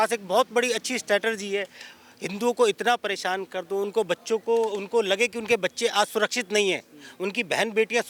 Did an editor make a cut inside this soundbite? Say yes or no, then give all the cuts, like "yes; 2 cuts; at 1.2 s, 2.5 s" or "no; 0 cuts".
no; 0 cuts